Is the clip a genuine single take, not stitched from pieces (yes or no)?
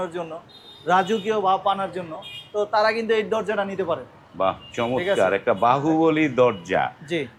yes